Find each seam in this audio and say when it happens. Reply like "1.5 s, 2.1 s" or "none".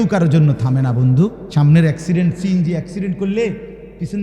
1.4 s